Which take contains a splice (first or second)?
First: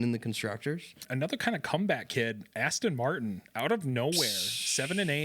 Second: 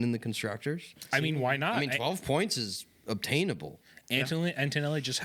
first